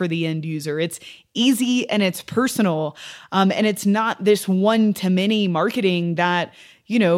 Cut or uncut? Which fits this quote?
uncut